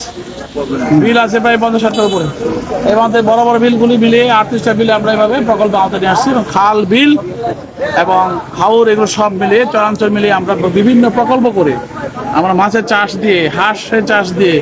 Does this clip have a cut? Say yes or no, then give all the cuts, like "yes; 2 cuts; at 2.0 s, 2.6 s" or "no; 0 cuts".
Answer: no; 0 cuts